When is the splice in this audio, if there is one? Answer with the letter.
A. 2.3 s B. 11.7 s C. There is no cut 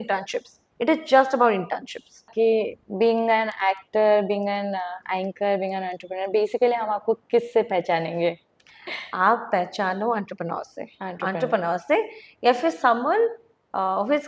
A